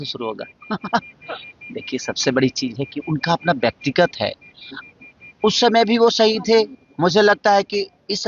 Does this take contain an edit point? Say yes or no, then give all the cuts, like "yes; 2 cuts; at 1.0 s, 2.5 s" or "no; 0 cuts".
no; 0 cuts